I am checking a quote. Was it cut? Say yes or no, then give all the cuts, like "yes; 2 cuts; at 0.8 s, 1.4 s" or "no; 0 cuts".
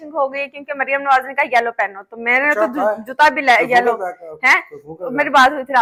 no; 0 cuts